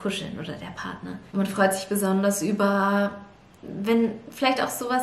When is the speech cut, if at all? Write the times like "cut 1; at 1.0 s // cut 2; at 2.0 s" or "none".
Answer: cut 1; at 1.2 s